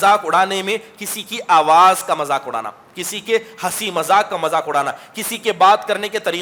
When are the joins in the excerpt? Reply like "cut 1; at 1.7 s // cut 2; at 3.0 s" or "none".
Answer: none